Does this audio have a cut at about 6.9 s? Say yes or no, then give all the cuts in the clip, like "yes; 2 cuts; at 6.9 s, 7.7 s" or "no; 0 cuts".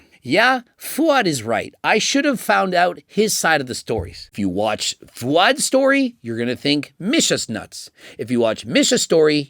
no; 1 cut; at 4.3 s